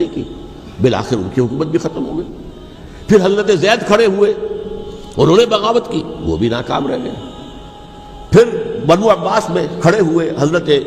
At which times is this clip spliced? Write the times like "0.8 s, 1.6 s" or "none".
none